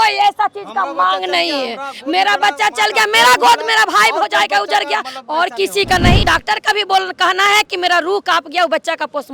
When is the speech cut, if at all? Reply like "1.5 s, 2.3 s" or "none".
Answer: 6.2 s